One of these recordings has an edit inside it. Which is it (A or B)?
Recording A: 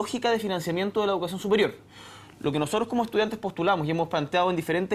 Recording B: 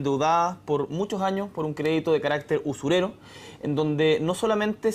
B